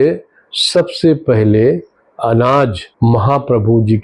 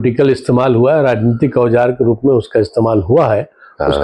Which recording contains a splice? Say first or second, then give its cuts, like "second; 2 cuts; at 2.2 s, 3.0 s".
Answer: first; 1 cut; at 2.8 s